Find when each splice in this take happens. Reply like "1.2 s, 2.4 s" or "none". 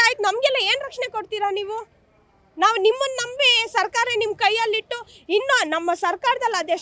none